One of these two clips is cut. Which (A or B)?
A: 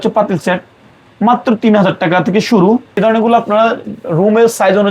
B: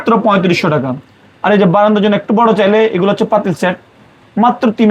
A